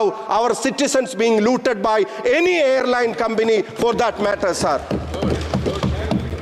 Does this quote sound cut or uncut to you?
uncut